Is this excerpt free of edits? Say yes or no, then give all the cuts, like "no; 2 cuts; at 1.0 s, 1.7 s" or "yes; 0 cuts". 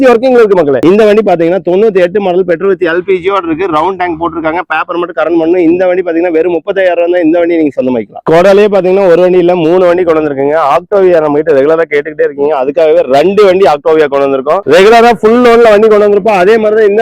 no; 2 cuts; at 0.8 s, 14.6 s